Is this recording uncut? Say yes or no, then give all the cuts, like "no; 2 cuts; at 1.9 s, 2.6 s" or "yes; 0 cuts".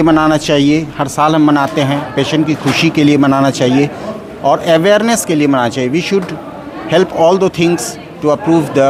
yes; 0 cuts